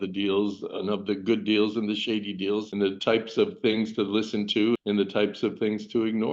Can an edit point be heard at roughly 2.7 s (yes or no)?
yes